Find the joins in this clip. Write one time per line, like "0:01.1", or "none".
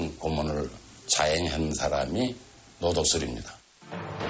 0:01.2
0:01.2
0:02.2